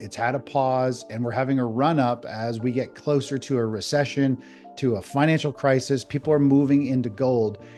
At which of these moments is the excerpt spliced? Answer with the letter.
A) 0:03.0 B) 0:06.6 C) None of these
C